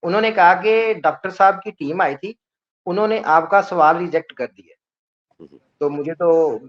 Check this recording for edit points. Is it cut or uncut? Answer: uncut